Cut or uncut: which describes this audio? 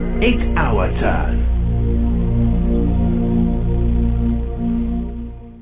cut